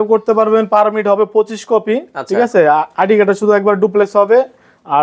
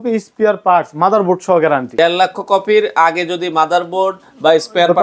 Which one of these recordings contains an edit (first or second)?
second